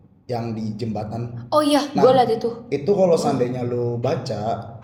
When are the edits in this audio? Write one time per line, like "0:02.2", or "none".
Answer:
none

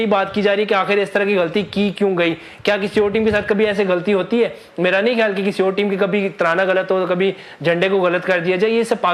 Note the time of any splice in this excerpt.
none

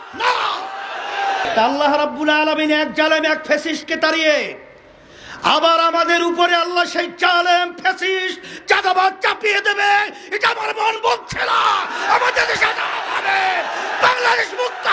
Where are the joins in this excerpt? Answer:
0:01.5

